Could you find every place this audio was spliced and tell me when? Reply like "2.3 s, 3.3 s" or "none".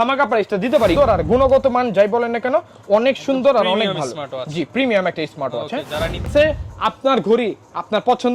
0.9 s, 6.3 s